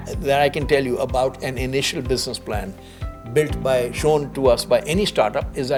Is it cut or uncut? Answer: uncut